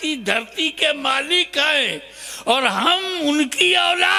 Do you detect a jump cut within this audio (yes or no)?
no